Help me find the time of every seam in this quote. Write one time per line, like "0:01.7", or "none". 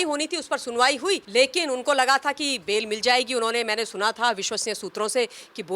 0:01.2